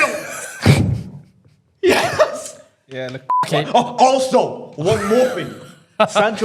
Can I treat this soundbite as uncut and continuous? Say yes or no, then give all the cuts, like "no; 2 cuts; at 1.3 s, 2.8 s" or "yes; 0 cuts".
no; 1 cut; at 3.5 s